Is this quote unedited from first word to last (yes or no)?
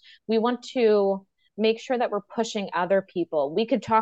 yes